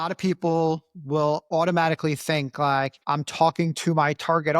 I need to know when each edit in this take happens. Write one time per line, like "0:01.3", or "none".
0:01.4
0:03.0